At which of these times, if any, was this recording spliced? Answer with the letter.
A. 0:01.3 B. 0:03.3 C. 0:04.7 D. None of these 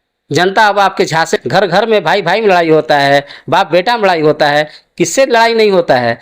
A